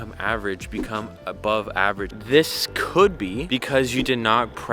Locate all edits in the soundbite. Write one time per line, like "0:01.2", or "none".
0:02.1